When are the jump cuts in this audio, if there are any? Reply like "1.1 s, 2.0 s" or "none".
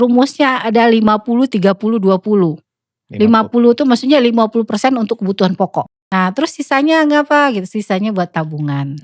6.0 s